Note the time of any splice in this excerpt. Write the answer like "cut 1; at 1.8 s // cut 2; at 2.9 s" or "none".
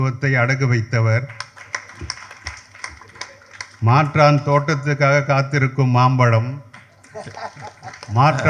none